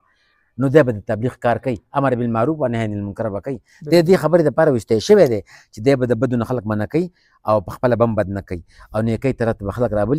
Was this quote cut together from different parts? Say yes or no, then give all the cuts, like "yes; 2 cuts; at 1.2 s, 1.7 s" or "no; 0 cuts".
no; 0 cuts